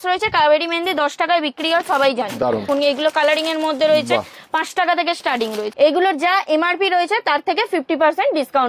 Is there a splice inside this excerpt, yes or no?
yes